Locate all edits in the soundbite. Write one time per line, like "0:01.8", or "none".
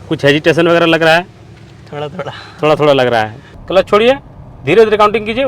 0:03.4

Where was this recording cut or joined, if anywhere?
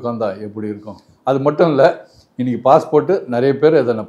0:01.1

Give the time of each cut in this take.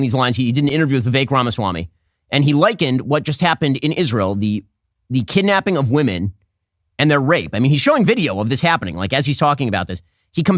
none

